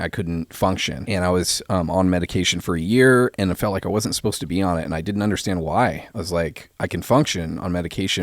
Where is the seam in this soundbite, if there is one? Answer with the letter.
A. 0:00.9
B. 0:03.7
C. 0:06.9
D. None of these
A